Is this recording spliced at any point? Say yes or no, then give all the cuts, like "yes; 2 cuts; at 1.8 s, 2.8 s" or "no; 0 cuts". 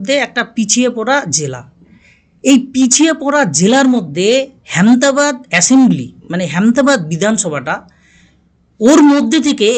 no; 0 cuts